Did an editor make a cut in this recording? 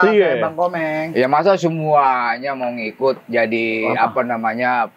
no; 0 cuts

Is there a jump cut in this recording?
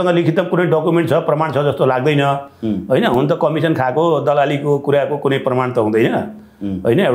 no; 0 cuts

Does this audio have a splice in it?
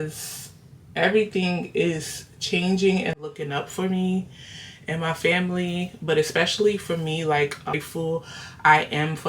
yes; 1 cut; at 7.8 s

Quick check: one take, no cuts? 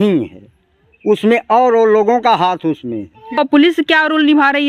no; 1 cut; at 3.4 s

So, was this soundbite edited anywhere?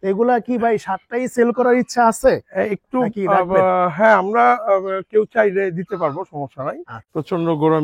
yes; 1 cut; at 6.9 s

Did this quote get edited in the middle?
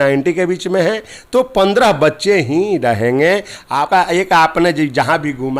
yes; 1 cut; at 3.9 s

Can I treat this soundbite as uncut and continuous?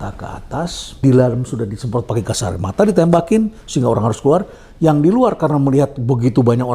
no; 1 cut; at 1.0 s

